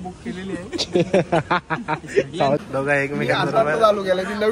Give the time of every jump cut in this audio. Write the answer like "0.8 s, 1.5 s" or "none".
2.6 s